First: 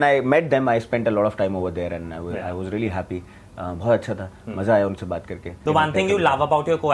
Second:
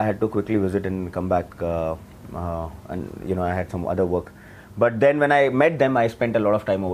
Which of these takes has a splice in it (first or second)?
first